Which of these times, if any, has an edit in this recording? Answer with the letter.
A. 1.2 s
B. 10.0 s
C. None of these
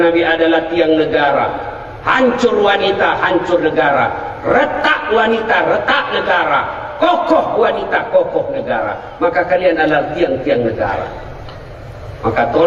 C